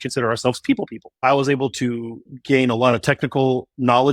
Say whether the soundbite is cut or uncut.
cut